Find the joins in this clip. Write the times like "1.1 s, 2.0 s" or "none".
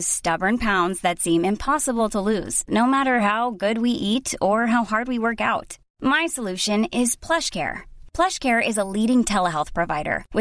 none

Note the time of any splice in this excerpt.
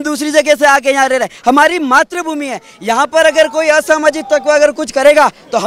none

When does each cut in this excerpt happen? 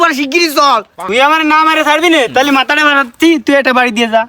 1.0 s

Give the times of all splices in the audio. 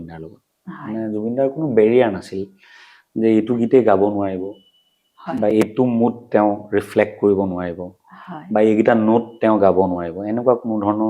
none

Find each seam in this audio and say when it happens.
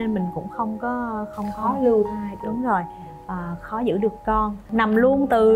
4.6 s

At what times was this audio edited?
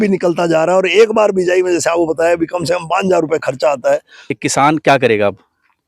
4.4 s

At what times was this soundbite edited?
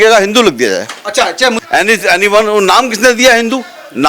1.6 s

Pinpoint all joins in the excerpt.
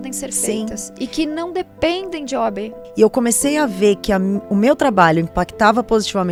none

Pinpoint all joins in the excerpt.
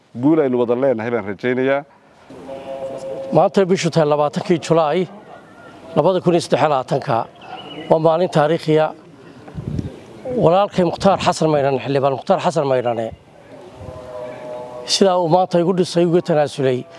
none

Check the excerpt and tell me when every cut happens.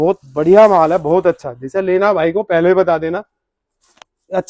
none

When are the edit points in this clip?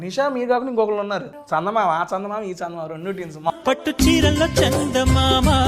1.3 s, 3.5 s

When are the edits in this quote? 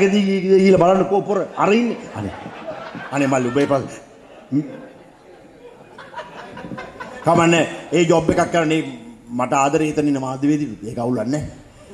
none

